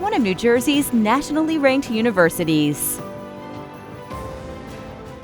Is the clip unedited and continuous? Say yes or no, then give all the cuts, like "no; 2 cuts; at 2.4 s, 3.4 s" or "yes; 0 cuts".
no; 1 cut; at 2.8 s